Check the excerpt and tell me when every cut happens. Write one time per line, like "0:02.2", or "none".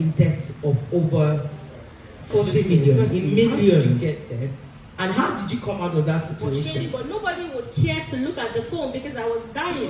0:04.0
0:06.8